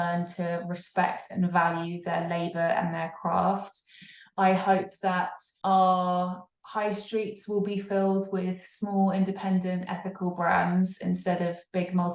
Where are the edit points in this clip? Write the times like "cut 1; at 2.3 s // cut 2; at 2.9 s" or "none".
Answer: cut 1; at 5.4 s